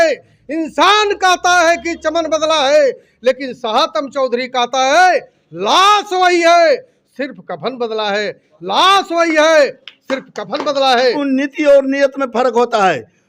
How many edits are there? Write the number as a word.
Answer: one